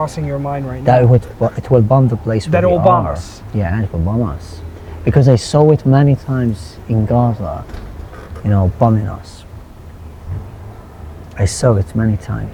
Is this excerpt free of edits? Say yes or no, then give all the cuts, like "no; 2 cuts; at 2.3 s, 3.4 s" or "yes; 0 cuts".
yes; 0 cuts